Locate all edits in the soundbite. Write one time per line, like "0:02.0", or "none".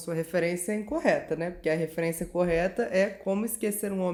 none